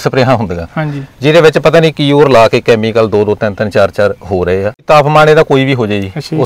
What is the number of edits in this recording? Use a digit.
1